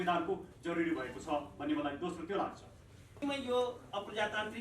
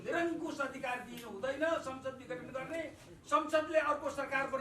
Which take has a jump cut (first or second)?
first